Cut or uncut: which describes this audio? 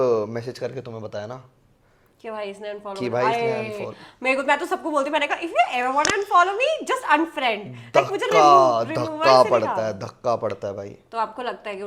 uncut